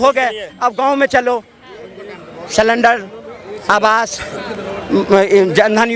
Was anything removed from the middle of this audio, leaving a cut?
no; 0 cuts

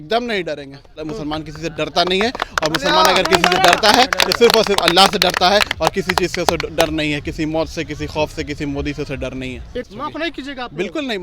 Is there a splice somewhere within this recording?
yes; 2 cuts; at 1.0 s, 9.9 s

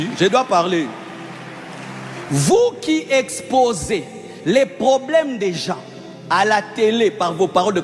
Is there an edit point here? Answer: no; 0 cuts

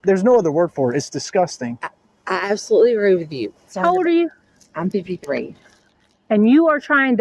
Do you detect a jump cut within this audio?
yes; 1 cut; at 3.7 s

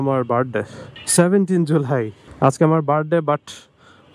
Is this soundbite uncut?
yes; 0 cuts

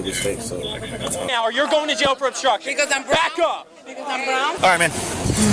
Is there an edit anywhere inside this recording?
yes; 2 cuts; at 1.3 s, 4.6 s

